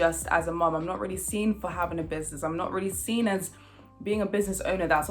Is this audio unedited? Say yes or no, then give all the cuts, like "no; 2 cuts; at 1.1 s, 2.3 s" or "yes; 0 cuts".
yes; 0 cuts